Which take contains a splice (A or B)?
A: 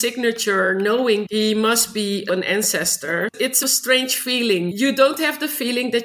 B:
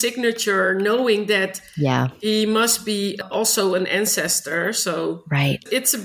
A